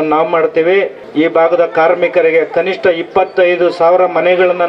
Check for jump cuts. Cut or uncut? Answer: cut